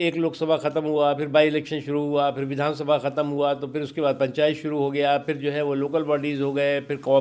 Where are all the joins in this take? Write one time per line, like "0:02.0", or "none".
none